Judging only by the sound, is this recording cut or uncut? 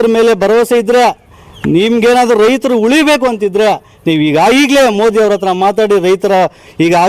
uncut